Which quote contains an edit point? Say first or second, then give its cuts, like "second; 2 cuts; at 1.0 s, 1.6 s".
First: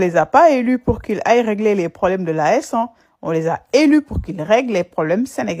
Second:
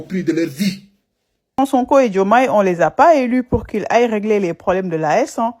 second; 1 cut; at 1.6 s